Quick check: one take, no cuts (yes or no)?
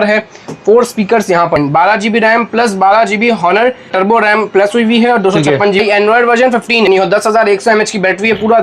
no